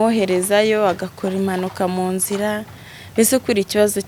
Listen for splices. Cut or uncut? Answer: uncut